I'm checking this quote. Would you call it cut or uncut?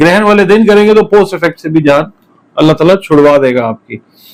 uncut